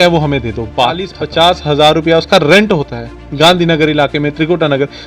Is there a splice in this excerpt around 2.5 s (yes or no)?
no